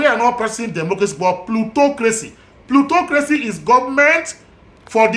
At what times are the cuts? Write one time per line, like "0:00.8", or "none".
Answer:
none